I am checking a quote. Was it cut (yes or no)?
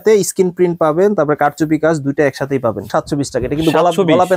yes